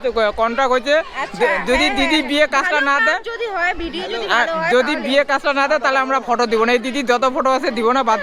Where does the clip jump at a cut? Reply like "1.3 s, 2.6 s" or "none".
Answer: none